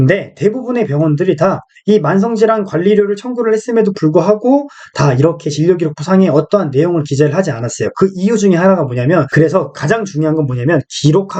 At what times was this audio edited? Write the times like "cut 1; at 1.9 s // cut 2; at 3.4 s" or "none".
cut 1; at 9.3 s

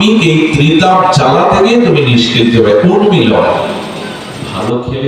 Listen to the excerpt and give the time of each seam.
cut 1; at 3.8 s

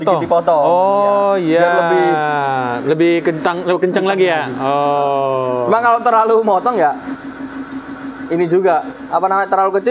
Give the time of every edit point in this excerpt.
none

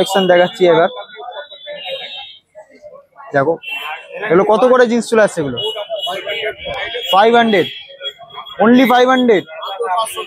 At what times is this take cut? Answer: none

